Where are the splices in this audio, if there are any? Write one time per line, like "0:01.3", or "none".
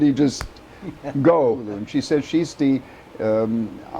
0:01.8